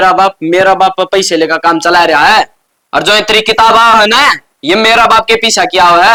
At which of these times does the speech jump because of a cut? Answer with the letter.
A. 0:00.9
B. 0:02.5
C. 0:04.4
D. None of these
D